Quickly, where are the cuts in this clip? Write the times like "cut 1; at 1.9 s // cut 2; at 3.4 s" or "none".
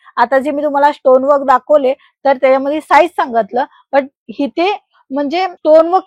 none